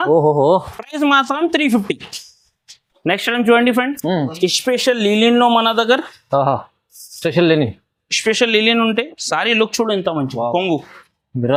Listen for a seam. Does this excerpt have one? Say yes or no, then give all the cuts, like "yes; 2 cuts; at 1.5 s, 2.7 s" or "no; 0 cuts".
no; 0 cuts